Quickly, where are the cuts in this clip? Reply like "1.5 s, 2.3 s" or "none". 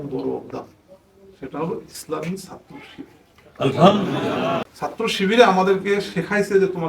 4.5 s